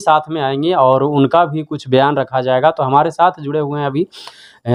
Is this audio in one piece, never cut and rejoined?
yes; 0 cuts

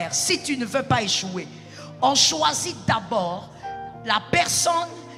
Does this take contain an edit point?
no; 0 cuts

